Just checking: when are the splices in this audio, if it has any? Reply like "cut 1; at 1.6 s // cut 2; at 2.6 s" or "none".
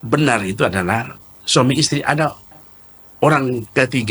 none